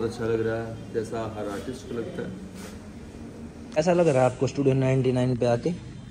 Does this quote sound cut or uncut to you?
cut